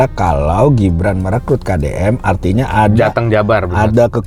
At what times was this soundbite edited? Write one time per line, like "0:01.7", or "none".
none